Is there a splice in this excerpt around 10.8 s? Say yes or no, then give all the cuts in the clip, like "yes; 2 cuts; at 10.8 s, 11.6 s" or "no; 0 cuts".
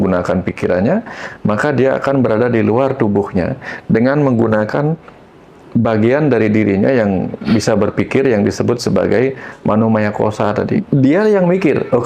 yes; 1 cut; at 10.8 s